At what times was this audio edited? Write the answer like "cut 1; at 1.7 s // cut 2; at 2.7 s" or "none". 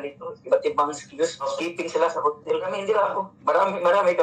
cut 1; at 1.5 s // cut 2; at 2.8 s